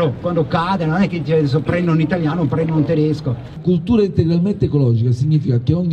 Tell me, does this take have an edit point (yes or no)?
yes